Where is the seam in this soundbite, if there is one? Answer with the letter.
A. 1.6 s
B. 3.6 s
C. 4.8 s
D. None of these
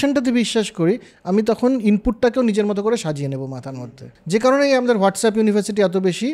B